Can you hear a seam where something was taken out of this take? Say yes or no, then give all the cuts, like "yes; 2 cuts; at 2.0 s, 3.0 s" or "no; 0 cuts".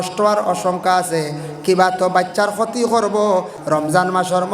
yes; 1 cut; at 3.5 s